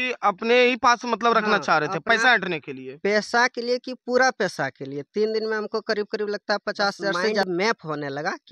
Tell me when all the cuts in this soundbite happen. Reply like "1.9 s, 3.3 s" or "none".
7.4 s